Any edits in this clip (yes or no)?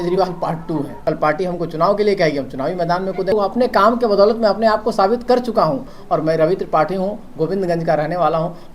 yes